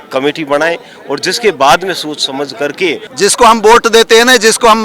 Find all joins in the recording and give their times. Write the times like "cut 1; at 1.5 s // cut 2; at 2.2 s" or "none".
cut 1; at 3.0 s